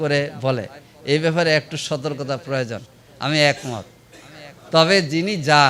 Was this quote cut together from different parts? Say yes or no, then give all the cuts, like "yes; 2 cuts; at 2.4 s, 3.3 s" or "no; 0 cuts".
no; 0 cuts